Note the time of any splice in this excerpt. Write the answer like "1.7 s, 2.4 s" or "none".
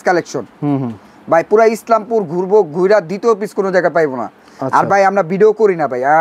none